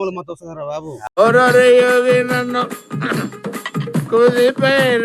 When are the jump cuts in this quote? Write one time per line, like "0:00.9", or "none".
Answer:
0:01.1

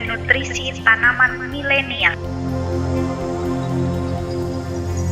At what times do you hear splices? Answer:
none

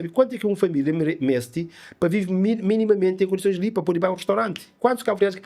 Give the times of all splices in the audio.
none

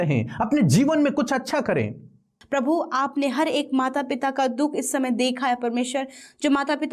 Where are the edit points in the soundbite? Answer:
0:02.4

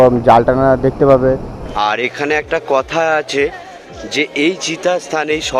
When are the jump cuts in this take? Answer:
0:01.6

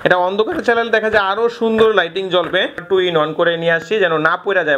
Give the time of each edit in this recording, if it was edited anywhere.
0:02.8

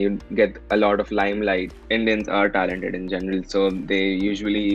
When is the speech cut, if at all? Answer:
0:01.8

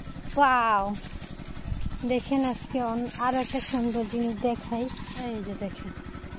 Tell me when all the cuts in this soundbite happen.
0:05.1

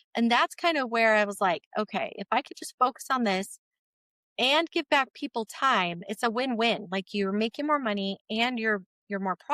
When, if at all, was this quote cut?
none

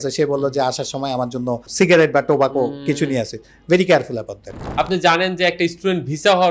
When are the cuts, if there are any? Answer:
0:01.7
0:04.6

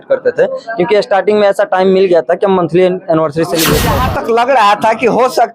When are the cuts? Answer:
0:03.9

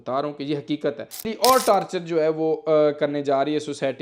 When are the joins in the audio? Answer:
0:01.3

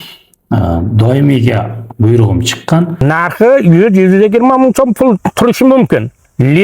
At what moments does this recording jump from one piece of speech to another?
0:03.0

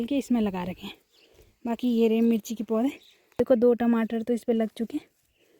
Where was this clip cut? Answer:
0:03.4

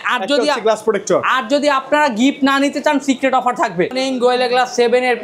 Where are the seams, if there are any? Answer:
0:03.9

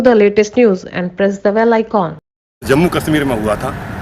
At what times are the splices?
0:02.7

